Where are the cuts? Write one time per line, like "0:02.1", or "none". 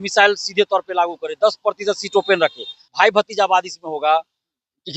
0:02.8